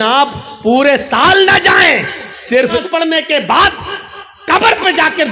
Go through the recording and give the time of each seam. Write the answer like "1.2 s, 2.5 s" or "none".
2.9 s